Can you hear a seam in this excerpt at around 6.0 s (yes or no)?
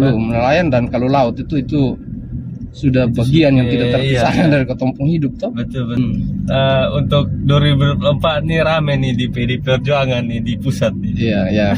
yes